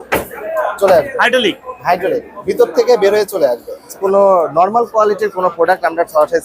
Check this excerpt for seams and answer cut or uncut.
cut